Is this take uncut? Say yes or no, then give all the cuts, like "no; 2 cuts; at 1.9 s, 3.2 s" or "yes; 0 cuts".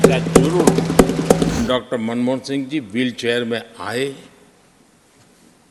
no; 1 cut; at 1.6 s